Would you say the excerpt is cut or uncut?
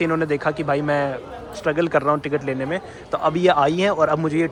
uncut